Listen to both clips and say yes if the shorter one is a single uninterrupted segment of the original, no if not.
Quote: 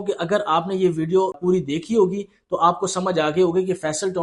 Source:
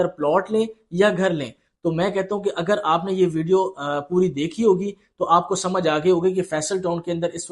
no